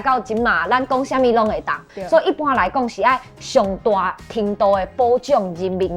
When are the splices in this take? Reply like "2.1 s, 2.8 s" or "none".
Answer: 1.8 s